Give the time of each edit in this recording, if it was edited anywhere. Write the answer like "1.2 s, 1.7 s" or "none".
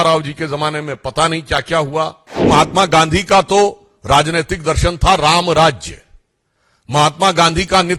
2.5 s